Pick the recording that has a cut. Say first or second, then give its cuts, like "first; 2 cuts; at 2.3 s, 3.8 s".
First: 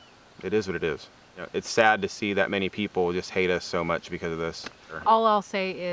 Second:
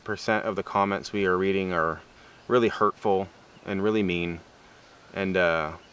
first; 2 cuts; at 1.5 s, 5.0 s